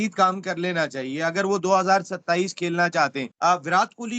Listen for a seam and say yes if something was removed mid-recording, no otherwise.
yes